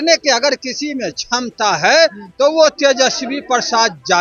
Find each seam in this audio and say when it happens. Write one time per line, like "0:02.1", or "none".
none